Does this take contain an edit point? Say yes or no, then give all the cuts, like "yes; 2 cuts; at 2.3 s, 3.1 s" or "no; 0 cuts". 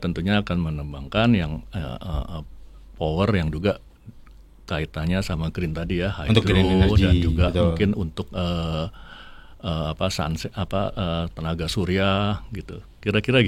no; 0 cuts